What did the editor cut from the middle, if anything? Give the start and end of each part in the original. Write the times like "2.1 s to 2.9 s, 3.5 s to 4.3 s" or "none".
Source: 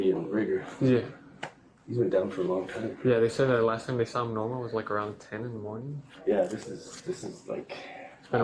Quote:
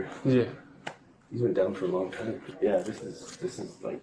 3.0 s to 6.0 s